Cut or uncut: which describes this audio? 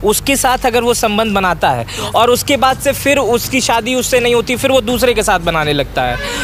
uncut